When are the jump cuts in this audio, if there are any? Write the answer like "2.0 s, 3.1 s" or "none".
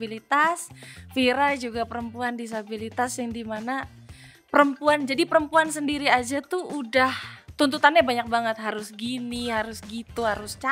none